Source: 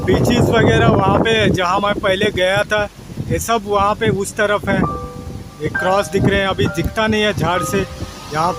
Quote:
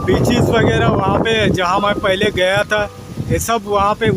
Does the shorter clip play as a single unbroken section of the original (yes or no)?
yes